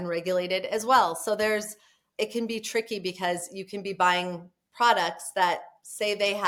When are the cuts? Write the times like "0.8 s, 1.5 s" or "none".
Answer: none